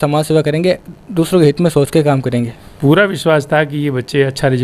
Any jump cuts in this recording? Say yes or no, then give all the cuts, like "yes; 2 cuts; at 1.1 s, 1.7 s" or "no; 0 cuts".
yes; 1 cut; at 2.7 s